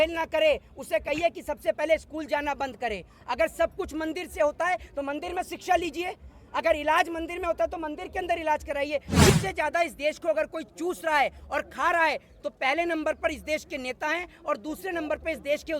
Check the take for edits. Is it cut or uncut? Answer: cut